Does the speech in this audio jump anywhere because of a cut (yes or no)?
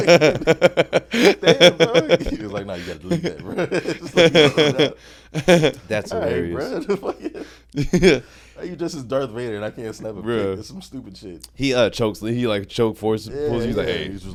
no